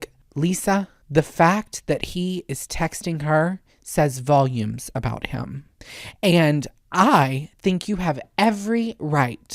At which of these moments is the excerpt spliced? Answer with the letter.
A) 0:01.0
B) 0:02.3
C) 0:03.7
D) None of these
A